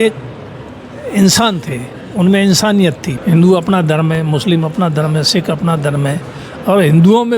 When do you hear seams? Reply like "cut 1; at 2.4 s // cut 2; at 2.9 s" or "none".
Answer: cut 1; at 3.1 s